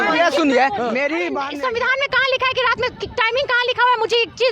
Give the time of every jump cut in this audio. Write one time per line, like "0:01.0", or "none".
0:01.4